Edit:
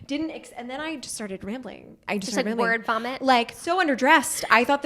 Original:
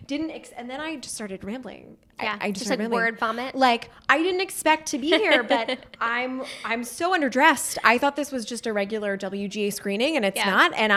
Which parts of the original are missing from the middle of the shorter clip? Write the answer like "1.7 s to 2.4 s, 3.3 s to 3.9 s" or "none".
2.0 s to 2.4 s, 3.9 s to 6.9 s

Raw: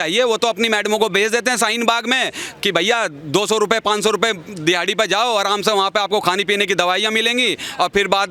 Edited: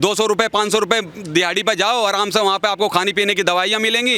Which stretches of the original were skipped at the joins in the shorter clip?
none

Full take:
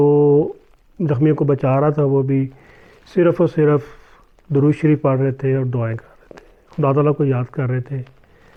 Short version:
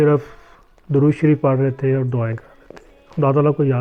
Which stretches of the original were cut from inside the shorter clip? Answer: none

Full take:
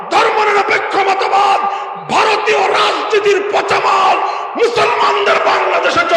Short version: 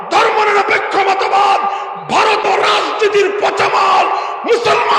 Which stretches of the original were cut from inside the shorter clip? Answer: 2.4 s to 2.6 s

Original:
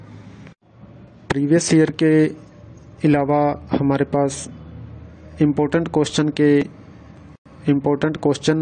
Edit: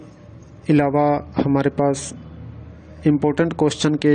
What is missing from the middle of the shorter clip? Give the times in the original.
none

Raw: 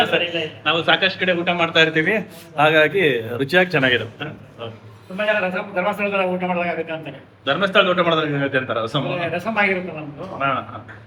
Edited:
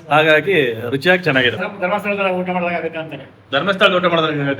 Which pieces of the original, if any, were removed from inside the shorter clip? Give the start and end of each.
4.1 s to 5.6 s

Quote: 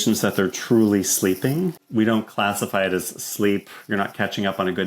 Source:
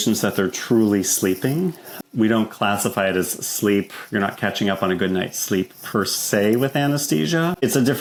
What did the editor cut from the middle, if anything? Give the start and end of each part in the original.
1.8 s to 2.0 s

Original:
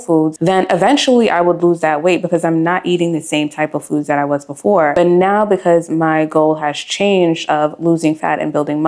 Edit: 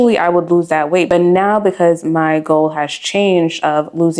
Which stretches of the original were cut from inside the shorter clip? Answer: 2.2 s to 4.9 s

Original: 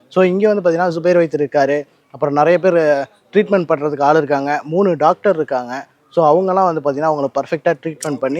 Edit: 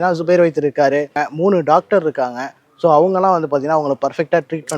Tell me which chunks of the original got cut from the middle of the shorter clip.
2.0 s to 4.6 s

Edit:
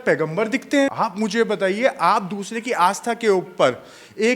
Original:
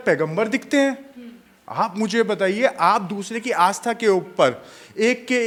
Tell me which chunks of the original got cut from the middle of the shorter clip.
0.9 s to 1.7 s

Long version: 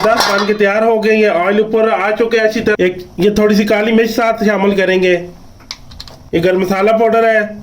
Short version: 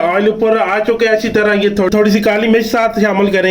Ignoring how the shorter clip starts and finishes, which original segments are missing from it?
3.0 s to 3.1 s

